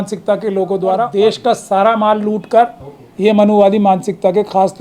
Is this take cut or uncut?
cut